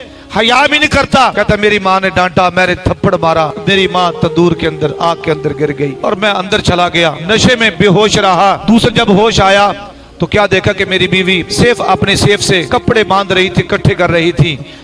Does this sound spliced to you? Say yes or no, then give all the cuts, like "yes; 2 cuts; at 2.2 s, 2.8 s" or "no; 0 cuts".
yes; 7 cuts; at 1.3 s, 3.6 s, 6.0 s, 7.2 s, 8.6 s, 11.5 s, 12.6 s